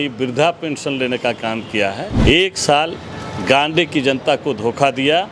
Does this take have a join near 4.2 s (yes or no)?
no